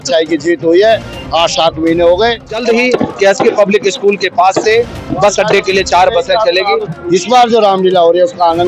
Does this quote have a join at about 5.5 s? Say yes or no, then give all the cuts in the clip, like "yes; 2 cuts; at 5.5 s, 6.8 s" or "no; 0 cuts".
no; 2 cuts; at 2.6 s, 6.9 s